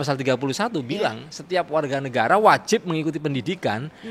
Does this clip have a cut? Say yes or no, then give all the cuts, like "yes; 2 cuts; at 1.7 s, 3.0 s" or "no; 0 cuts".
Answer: no; 0 cuts